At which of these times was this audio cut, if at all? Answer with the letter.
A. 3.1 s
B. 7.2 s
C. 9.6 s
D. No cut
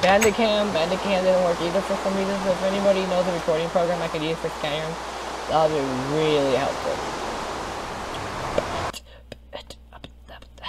A